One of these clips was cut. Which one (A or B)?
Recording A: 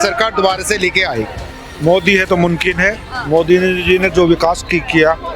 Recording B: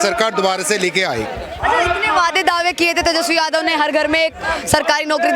A